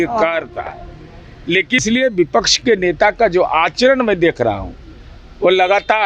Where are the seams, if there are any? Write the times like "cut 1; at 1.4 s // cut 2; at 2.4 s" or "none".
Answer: cut 1; at 1.8 s